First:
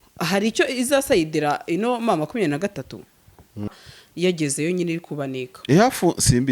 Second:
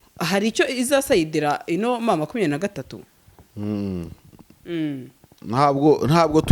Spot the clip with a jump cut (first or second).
first